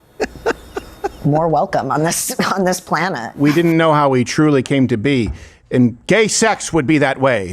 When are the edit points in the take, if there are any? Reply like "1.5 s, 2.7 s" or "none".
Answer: 3.3 s